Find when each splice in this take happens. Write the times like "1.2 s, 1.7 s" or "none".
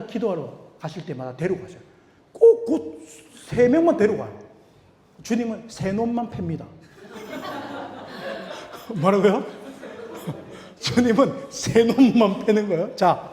none